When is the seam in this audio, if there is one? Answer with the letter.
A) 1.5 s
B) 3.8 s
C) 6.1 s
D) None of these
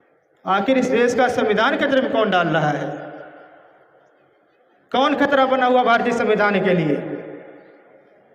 D